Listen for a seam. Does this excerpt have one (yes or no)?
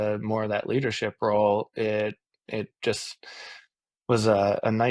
no